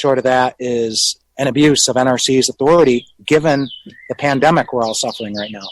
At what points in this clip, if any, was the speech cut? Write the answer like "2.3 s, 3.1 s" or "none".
none